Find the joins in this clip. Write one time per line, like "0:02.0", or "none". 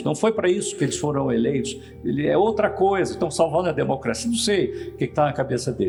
none